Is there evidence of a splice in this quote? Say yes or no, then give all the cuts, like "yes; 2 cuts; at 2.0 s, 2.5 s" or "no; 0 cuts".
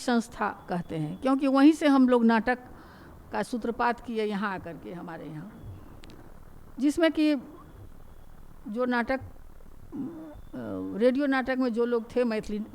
no; 0 cuts